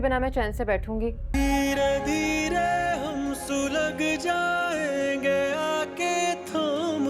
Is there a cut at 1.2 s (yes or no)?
yes